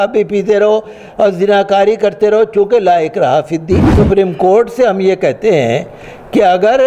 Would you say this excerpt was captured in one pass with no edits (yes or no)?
no